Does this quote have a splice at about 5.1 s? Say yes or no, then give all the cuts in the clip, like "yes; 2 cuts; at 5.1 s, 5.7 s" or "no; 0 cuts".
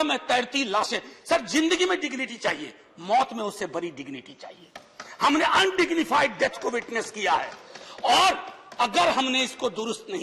no; 0 cuts